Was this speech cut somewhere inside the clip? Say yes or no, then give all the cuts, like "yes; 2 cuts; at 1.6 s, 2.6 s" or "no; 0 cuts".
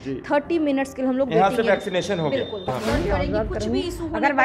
yes; 1 cut; at 2.6 s